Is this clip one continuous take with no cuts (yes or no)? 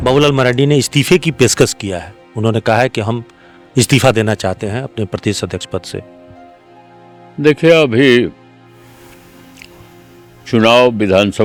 yes